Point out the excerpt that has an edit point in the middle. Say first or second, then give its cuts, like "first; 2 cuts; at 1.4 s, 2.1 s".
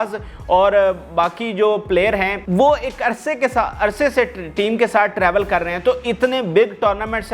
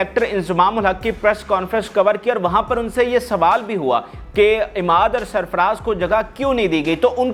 first; 1 cut; at 2.4 s